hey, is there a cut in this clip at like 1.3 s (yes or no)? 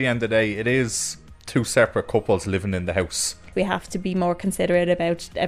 no